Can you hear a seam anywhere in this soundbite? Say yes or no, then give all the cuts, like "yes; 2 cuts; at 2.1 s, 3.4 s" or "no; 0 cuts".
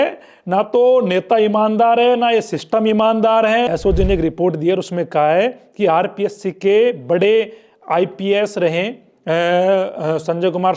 yes; 1 cut; at 3.7 s